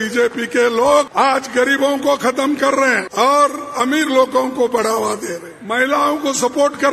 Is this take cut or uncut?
cut